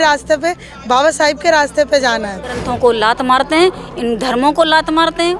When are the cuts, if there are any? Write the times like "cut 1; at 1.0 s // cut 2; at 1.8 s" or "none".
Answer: cut 1; at 2.6 s